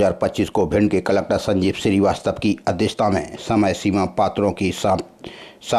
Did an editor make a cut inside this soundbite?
no; 0 cuts

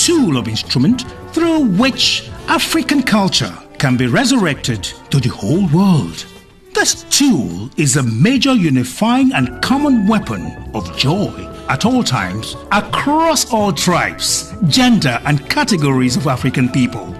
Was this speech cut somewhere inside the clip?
yes; 1 cut; at 6.0 s

